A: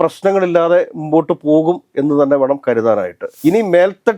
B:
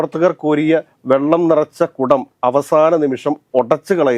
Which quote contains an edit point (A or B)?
A